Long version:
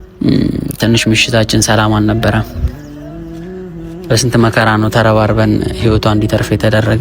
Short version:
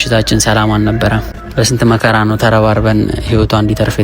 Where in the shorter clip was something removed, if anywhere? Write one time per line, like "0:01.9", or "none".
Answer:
0:01.4